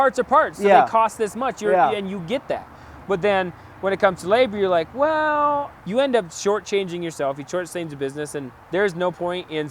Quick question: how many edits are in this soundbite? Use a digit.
2